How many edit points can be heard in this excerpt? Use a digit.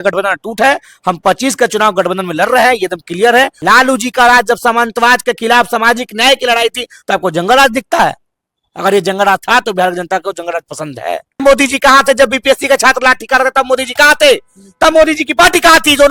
2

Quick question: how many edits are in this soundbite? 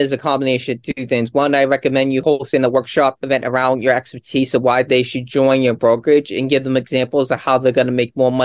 0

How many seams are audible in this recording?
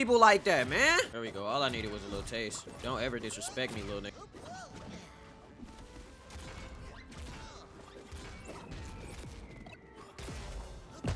2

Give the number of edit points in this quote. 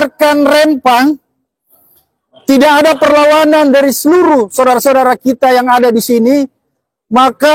0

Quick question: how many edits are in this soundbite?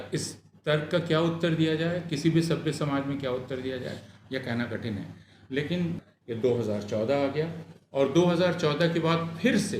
1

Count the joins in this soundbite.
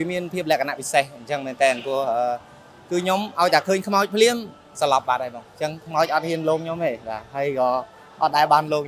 0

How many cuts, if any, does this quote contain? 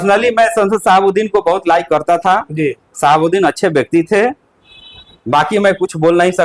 0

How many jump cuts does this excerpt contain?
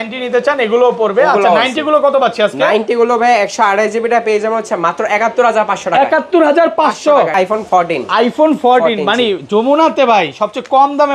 1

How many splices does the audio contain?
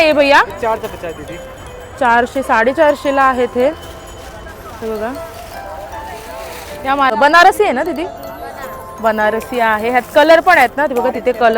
1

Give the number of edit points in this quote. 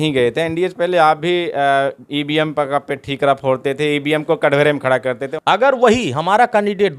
1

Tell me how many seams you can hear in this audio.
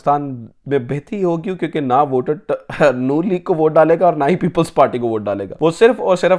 1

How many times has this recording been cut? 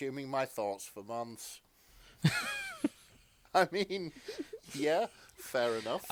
0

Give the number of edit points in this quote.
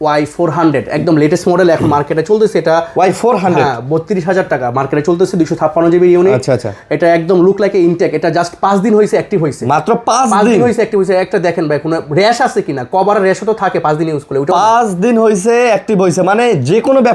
0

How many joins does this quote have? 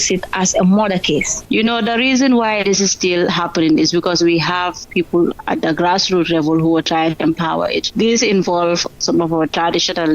3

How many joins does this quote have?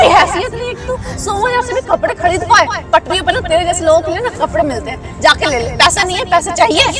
0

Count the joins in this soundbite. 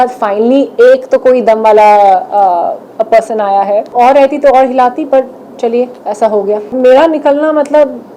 2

